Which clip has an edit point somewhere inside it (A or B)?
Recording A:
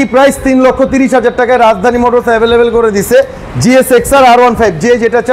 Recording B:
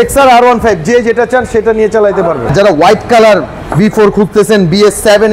B